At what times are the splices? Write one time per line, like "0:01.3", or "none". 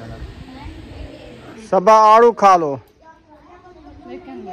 0:01.6